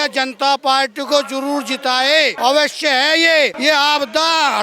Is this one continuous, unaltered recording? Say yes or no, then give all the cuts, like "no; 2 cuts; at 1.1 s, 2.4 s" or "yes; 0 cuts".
no; 2 cuts; at 2.3 s, 3.6 s